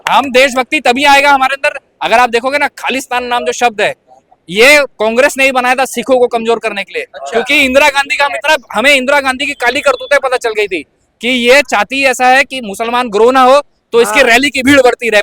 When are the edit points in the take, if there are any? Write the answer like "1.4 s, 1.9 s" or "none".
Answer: none